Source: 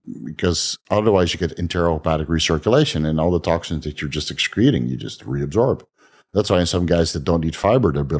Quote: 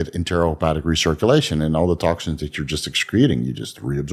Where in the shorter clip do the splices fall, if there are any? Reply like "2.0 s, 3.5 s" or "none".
none